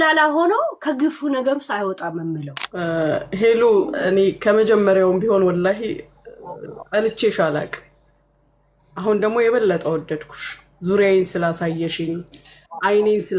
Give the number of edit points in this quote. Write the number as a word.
one